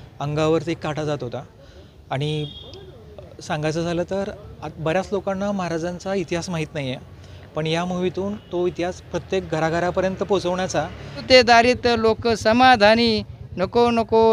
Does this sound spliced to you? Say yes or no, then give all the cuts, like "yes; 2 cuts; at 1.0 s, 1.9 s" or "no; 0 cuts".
yes; 1 cut; at 11.2 s